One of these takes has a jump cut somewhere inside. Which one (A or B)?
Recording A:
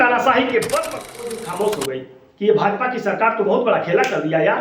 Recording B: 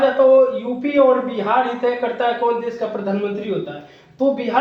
A